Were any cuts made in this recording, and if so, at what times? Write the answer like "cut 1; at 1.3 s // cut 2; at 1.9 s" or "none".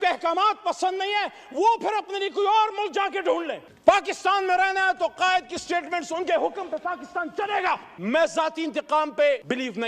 cut 1; at 7.9 s